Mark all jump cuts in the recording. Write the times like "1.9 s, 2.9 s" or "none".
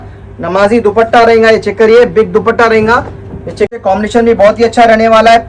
3.8 s